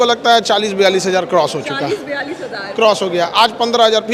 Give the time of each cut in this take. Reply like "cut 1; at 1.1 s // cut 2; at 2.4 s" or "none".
none